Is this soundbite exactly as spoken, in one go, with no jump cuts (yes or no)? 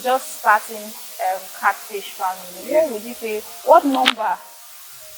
yes